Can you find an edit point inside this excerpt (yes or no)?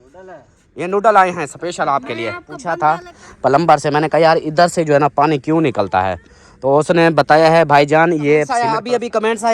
yes